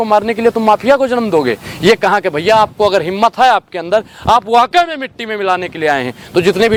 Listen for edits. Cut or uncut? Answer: uncut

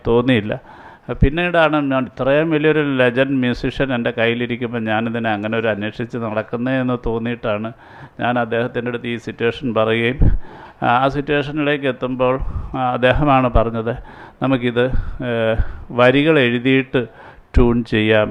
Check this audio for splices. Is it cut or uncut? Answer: uncut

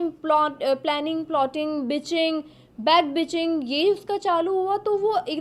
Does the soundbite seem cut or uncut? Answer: uncut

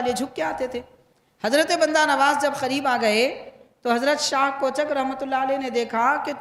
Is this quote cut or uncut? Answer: uncut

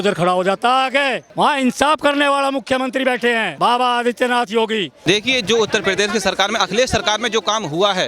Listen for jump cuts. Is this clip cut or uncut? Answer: cut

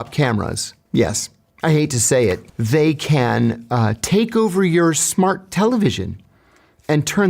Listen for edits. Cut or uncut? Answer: cut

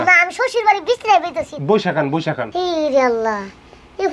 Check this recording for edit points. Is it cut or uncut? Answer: cut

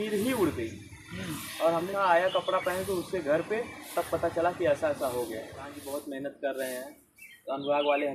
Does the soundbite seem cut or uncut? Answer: cut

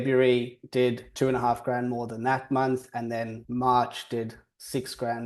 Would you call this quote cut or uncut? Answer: cut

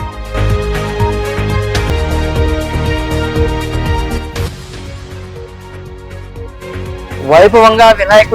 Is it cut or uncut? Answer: cut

